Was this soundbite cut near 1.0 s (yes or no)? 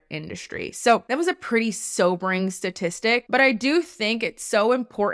yes